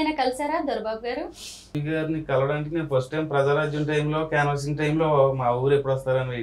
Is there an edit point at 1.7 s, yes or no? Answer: yes